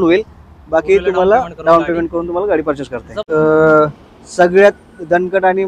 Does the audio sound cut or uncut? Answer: cut